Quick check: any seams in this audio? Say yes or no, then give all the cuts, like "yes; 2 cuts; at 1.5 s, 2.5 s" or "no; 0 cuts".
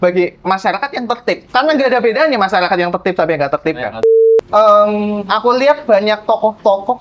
yes; 2 cuts; at 1.4 s, 4.0 s